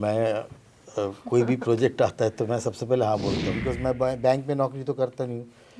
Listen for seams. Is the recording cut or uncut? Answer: cut